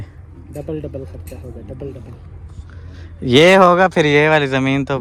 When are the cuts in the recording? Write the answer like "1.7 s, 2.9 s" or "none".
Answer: none